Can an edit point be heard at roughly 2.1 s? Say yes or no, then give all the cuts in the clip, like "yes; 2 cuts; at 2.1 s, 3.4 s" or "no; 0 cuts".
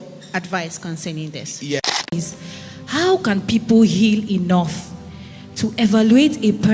yes; 1 cut; at 2.1 s